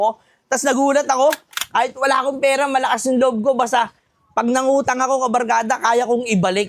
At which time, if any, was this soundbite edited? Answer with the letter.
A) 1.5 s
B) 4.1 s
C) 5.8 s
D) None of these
A